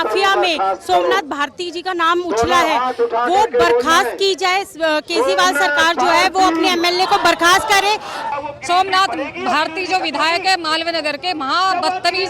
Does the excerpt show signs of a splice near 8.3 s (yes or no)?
yes